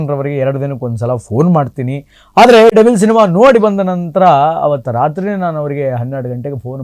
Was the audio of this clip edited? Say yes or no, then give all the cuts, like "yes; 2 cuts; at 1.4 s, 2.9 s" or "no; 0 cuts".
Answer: no; 0 cuts